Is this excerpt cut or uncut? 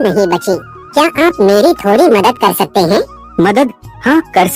cut